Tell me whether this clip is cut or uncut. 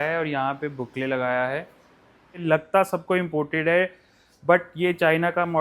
cut